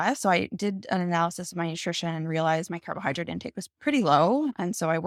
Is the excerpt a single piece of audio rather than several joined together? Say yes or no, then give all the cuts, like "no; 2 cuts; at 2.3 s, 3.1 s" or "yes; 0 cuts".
yes; 0 cuts